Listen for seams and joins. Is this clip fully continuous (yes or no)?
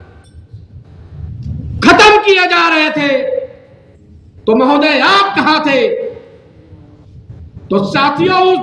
yes